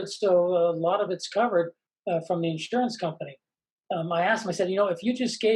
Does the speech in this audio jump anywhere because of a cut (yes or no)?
no